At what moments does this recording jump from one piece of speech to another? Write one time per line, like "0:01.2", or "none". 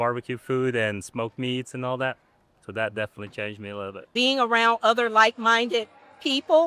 0:04.1